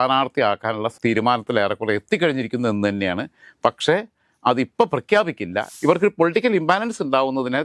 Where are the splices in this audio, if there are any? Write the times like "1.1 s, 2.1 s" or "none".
5.7 s